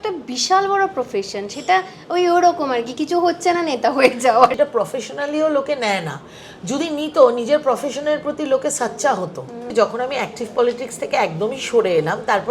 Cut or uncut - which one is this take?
cut